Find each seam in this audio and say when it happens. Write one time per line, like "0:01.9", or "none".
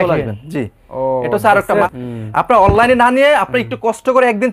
0:01.9

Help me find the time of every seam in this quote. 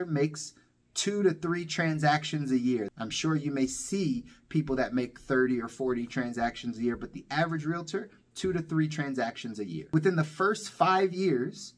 0:02.9
0:09.9

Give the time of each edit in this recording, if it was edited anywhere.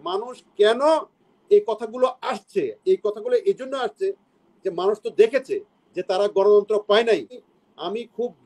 0:07.4

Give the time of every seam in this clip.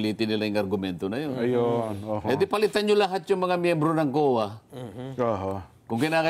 none

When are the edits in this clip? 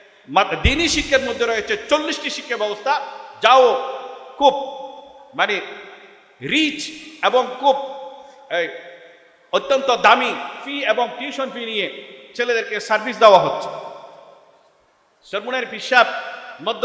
none

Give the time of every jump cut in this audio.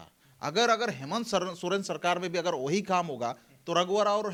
none

